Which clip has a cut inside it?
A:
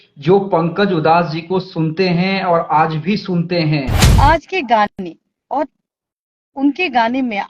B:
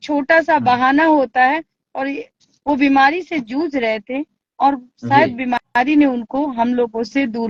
A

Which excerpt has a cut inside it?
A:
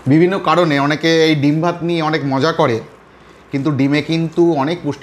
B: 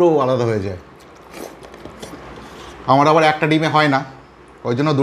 B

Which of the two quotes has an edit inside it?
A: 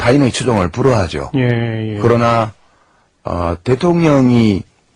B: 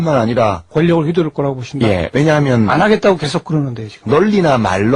A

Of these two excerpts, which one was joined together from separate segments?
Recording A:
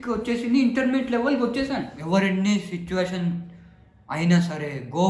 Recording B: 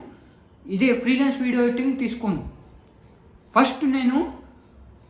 A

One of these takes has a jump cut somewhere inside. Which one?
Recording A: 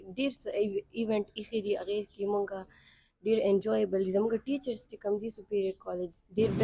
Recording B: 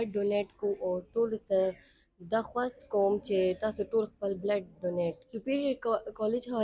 B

